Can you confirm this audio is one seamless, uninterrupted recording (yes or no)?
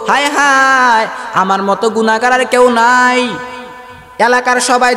yes